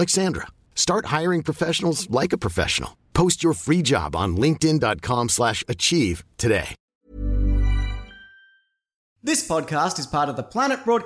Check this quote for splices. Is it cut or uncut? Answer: cut